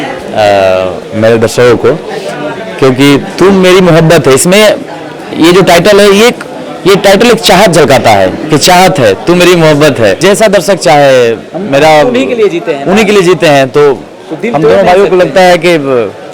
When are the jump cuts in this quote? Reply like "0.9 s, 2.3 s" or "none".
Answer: 10.2 s